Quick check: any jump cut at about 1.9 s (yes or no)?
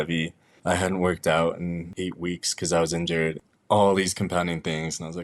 yes